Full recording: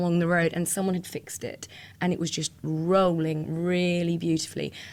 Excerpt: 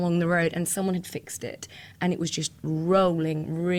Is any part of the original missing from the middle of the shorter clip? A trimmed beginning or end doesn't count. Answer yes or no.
no